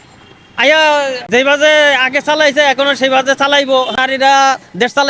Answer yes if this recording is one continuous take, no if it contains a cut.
no